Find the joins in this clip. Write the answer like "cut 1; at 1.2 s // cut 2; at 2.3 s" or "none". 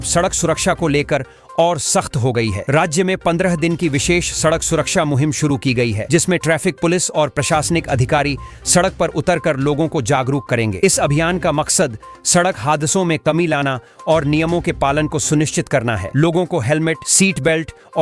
none